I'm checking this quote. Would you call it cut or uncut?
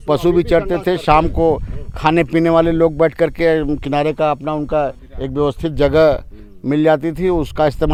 uncut